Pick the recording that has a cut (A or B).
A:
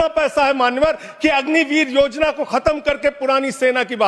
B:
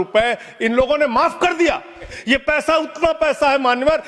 B